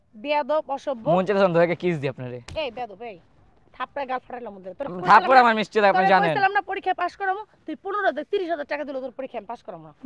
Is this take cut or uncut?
uncut